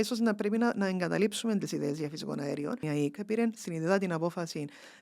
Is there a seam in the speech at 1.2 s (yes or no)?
no